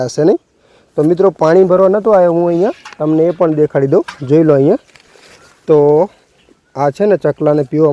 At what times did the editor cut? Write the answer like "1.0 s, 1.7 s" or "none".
none